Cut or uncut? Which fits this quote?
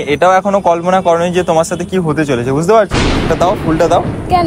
cut